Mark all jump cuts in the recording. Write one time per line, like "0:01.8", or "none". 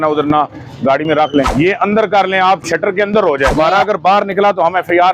0:01.5
0:03.5